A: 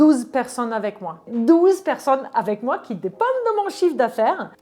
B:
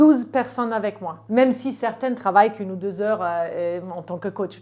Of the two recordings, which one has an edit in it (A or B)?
A